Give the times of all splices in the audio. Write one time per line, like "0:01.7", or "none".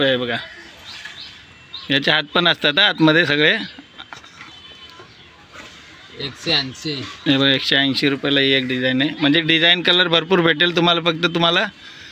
none